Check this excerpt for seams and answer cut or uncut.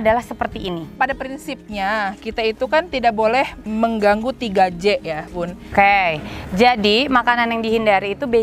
cut